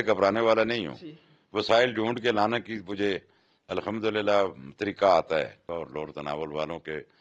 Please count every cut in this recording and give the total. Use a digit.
1